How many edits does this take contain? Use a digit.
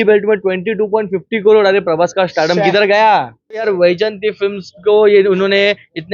1